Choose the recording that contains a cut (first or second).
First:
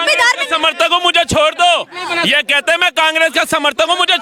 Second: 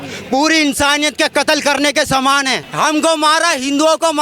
second